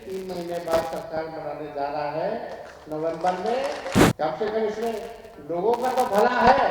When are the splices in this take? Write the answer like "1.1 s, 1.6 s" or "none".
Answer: 4.0 s